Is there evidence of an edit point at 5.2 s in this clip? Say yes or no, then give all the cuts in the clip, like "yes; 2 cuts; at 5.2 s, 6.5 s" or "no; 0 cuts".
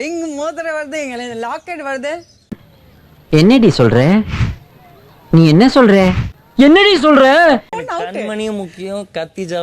no; 1 cut; at 7.7 s